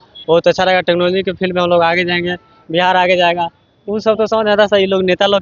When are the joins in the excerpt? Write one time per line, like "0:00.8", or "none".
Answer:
none